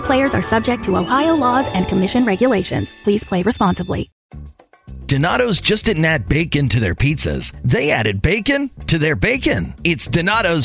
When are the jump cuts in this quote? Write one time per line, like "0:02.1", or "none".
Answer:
0:04.2